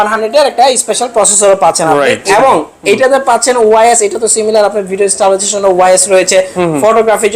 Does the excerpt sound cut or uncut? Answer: cut